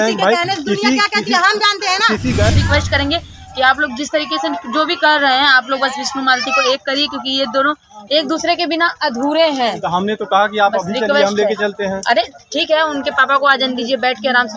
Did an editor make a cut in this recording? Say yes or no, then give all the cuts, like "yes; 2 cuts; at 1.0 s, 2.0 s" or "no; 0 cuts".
yes; 1 cut; at 2.5 s